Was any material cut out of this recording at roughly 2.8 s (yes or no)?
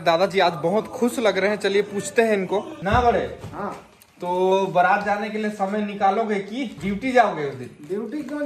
yes